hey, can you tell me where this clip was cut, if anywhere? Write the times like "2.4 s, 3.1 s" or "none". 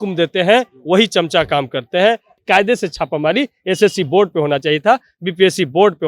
2.4 s

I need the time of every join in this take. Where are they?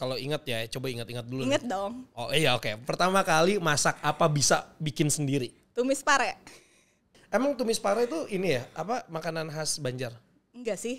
7.2 s

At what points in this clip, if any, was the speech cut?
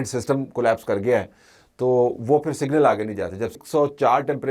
3.6 s

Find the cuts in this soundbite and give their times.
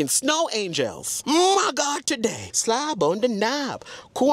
1.1 s, 2.4 s

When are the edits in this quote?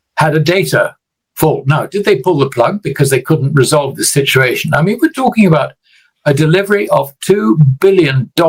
none

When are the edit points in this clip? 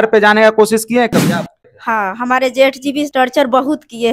1.5 s, 3.1 s

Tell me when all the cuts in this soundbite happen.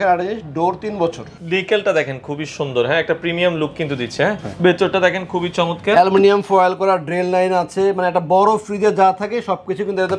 1.3 s, 4.5 s

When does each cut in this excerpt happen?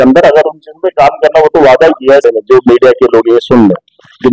2.2 s

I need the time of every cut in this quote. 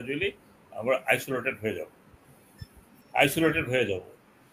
none

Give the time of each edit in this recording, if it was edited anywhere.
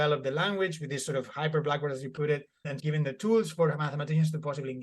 2.8 s

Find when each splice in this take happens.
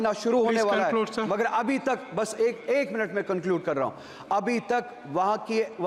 none

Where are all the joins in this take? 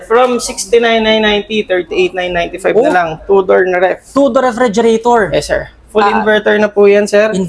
none

